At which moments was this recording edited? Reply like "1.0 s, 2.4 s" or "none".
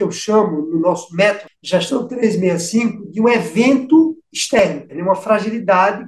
1.5 s, 4.6 s